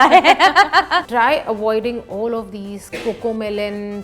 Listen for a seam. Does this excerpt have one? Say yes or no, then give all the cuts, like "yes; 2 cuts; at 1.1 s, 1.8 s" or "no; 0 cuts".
yes; 1 cut; at 1.1 s